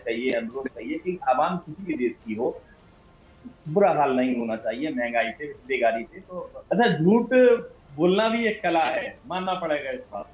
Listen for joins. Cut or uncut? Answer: cut